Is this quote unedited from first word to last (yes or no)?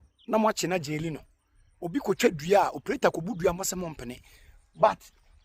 yes